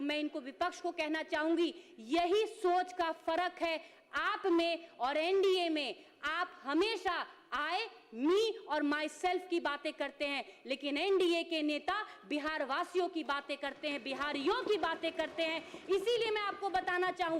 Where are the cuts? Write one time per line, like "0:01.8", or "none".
none